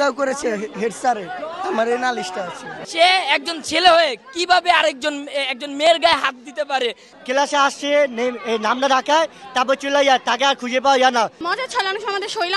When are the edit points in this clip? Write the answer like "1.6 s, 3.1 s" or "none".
2.7 s, 7.0 s, 11.4 s